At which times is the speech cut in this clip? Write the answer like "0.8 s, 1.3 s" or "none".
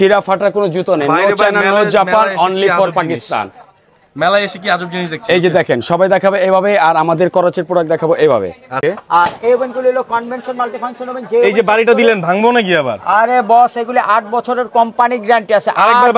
8.8 s